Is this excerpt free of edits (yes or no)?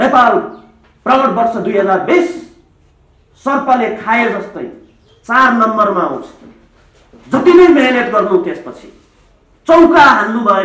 yes